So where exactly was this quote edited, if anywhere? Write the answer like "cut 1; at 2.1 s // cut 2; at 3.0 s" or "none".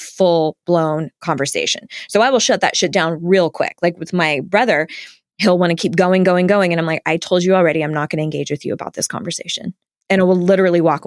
cut 1; at 9.9 s